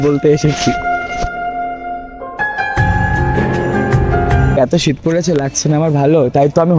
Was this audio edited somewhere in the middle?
yes; 1 cut; at 4.6 s

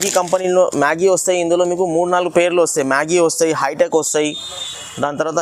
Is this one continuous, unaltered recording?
yes; 0 cuts

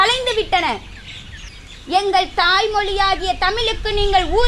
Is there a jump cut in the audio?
yes; 1 cut; at 1.3 s

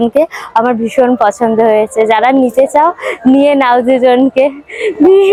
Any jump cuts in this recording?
no; 0 cuts

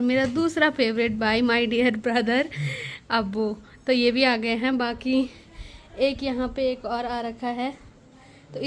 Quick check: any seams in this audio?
no; 0 cuts

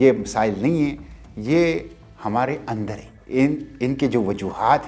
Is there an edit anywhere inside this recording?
yes; 1 cut; at 3.1 s

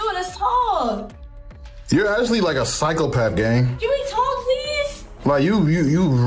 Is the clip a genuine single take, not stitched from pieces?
yes; 0 cuts

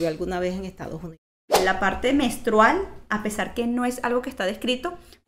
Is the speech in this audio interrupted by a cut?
yes; 1 cut; at 1.6 s

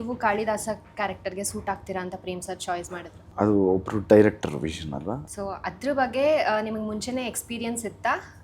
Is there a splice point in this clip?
yes; 2 cuts; at 3.3 s, 5.2 s

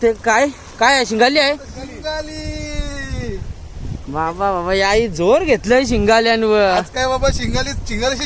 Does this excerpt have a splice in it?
no; 0 cuts

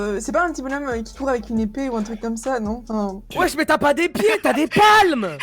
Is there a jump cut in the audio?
yes; 1 cut; at 3.2 s

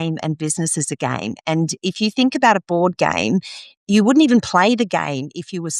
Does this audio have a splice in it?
no; 0 cuts

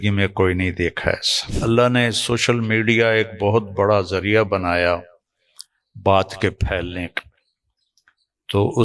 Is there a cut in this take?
yes; 1 cut; at 1.5 s

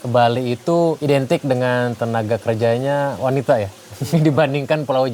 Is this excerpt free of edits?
no; 1 cut; at 1.0 s

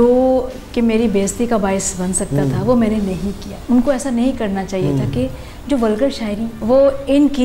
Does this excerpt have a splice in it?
yes; 2 cuts; at 3.5 s, 6.5 s

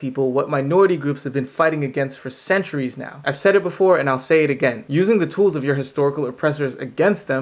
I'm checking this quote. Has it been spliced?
yes; 1 cut; at 3.2 s

